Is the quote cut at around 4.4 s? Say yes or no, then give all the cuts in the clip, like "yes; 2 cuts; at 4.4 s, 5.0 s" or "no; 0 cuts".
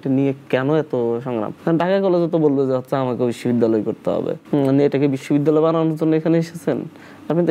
yes; 1 cut; at 4.4 s